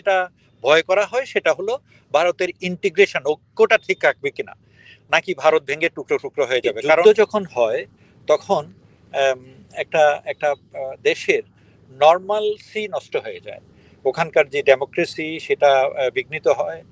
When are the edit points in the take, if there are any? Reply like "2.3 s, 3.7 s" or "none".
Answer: 7.0 s